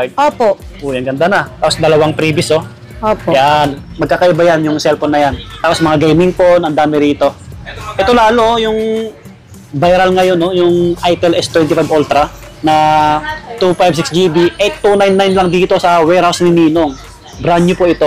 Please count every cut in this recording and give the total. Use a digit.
1